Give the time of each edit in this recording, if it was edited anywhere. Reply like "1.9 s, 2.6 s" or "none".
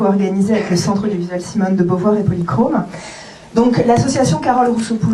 1.5 s